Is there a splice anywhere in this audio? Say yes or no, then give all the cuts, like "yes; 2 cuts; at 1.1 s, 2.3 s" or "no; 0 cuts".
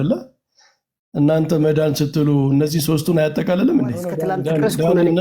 yes; 1 cut; at 4.2 s